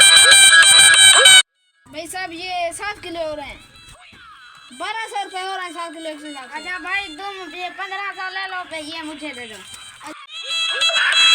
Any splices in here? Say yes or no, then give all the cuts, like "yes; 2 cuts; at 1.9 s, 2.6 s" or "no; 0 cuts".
yes; 1 cut; at 1.0 s